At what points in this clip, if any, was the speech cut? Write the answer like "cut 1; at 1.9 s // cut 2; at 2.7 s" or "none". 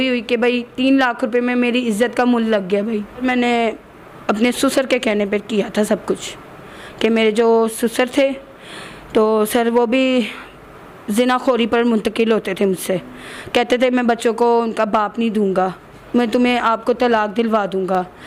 none